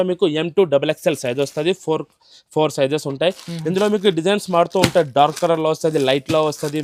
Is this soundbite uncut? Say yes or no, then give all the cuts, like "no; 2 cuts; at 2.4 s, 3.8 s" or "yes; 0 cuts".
yes; 0 cuts